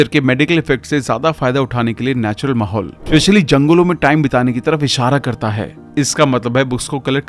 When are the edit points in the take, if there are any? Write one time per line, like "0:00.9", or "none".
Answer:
0:05.7